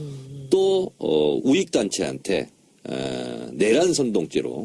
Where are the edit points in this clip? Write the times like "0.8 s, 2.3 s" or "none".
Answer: 1.2 s